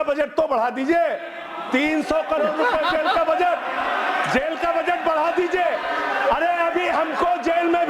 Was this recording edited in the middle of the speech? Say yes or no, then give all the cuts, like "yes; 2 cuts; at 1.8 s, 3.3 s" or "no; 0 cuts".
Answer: no; 0 cuts